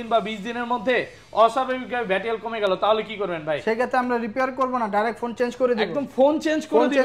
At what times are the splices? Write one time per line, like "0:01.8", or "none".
none